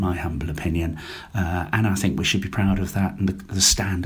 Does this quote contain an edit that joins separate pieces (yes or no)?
no